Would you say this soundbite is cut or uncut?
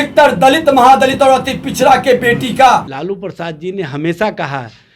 cut